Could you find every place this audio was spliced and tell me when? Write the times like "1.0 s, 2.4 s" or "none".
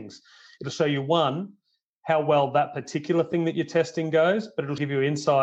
none